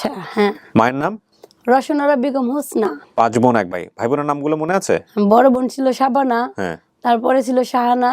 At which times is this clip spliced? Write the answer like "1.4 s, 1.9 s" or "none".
3.0 s

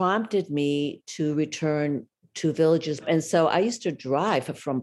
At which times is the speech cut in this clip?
2.9 s

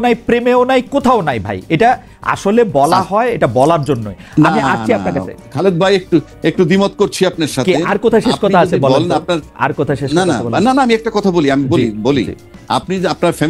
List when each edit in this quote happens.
none

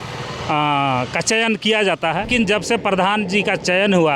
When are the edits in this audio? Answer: 2.3 s

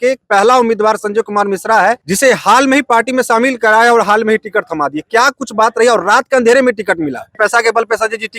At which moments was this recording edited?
2.1 s, 7.4 s

